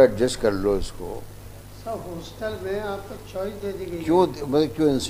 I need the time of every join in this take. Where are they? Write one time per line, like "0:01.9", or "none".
none